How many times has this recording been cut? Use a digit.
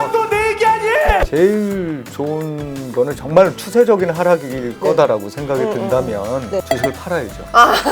2